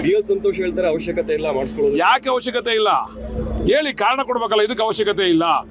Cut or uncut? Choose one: uncut